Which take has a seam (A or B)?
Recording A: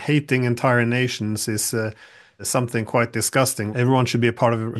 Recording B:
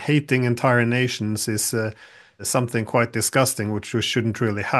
A